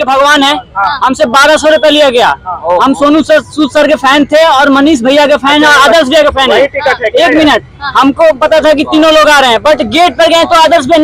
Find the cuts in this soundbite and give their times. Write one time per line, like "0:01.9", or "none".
none